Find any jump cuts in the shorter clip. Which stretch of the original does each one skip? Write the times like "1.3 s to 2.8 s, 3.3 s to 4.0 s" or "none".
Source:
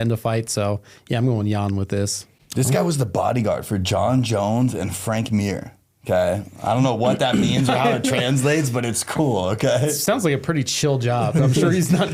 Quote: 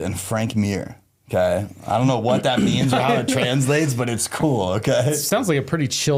none